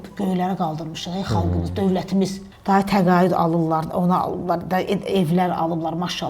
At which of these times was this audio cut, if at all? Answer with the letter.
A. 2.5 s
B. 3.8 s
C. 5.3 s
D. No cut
A